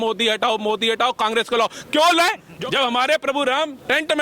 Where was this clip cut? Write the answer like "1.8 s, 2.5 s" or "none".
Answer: 2.5 s